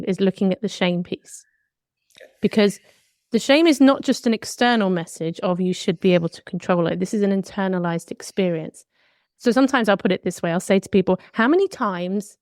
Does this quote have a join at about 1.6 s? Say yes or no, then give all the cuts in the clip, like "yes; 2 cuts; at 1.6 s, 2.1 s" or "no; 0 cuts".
no; 0 cuts